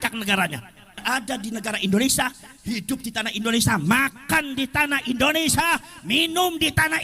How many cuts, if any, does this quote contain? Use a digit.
1